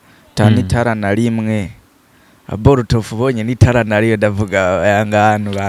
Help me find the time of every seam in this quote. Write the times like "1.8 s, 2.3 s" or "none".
none